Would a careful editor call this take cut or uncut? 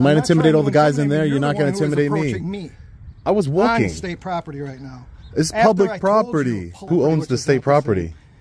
cut